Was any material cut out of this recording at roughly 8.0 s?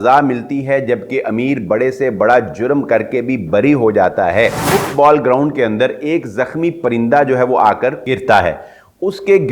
yes; 2 cuts; at 4.7 s, 8.0 s

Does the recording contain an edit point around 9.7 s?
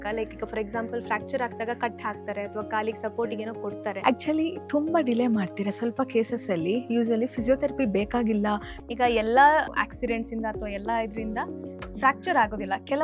yes; 3 cuts; at 3.9 s, 8.7 s, 9.7 s

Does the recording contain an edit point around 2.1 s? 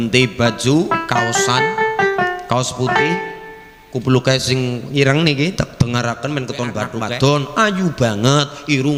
no; 1 cut; at 6.9 s

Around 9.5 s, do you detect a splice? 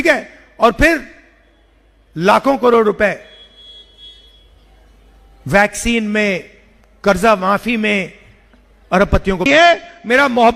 yes; 1 cut; at 9.5 s

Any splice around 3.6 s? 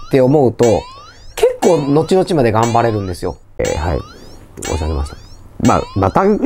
yes; 1 cut; at 3.6 s

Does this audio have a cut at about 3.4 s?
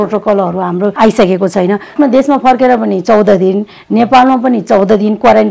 no; 2 cuts; at 0.9 s, 1.9 s

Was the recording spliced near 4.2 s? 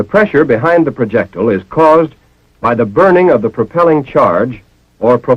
yes; 1 cut; at 4.2 s

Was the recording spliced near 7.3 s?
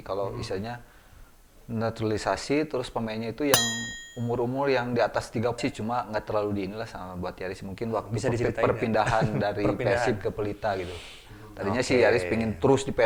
no; 1 cut; at 5.6 s

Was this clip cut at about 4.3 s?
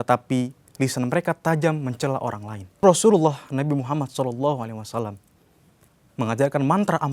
no; 1 cut; at 2.8 s

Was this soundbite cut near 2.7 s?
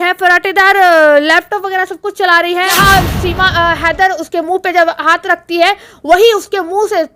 yes; 1 cut; at 2.7 s

